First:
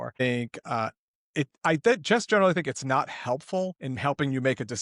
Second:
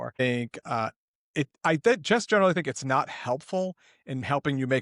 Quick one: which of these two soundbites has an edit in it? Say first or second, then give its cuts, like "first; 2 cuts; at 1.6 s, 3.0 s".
first; 1 cut; at 3.8 s